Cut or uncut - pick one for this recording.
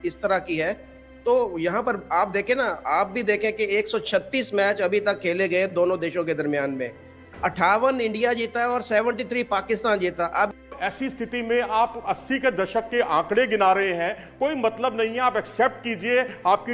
cut